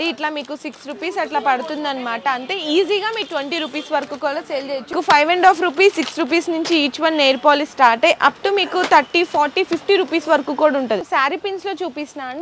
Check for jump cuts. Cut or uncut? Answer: cut